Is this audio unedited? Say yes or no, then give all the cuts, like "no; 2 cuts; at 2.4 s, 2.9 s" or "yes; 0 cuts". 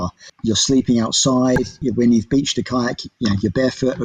yes; 0 cuts